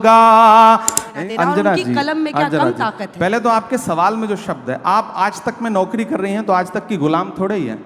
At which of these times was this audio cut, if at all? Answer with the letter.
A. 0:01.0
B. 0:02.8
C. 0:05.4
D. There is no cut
A